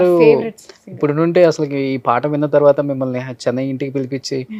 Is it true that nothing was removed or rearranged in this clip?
yes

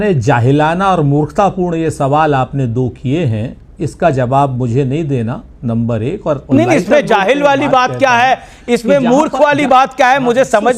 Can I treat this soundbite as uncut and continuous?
yes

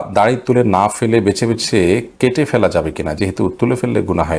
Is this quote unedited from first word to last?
yes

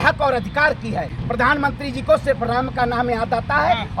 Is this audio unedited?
no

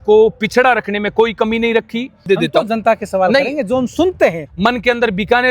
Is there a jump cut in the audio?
yes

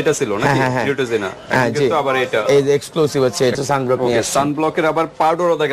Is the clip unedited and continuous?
no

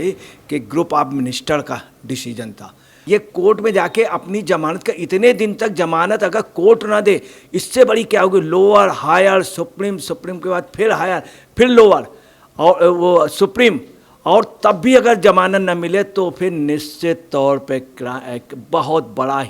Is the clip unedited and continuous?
no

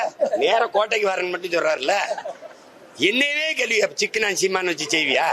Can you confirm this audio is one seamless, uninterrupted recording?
yes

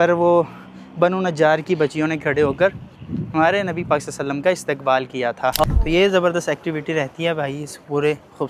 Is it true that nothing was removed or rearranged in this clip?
no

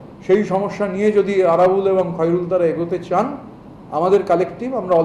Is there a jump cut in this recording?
no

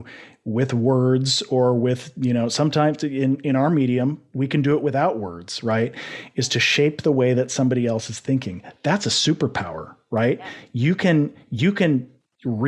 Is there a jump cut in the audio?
no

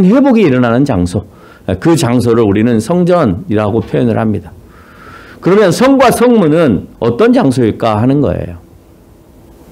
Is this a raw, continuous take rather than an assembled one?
yes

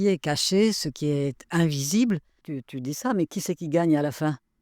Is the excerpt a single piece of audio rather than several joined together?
no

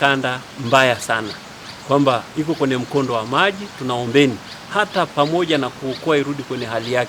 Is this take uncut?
yes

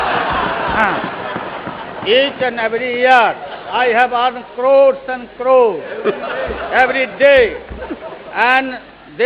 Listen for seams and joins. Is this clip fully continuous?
yes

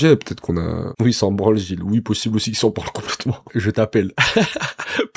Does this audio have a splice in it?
no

